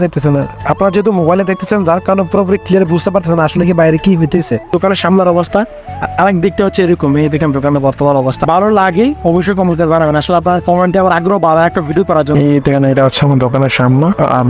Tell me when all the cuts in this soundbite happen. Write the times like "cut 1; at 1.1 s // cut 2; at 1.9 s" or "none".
cut 1; at 4.7 s // cut 2; at 8.4 s // cut 3; at 12.3 s